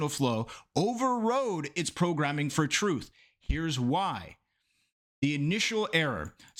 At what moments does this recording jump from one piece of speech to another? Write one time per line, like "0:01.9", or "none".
none